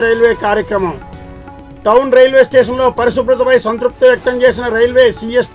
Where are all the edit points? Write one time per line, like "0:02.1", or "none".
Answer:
none